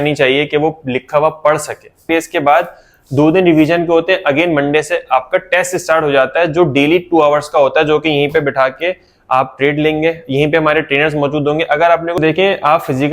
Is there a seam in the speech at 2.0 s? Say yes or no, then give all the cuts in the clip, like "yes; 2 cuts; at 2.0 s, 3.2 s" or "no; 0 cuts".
yes; 2 cuts; at 2.0 s, 12.2 s